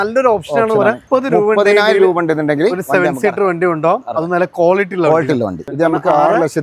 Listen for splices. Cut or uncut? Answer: cut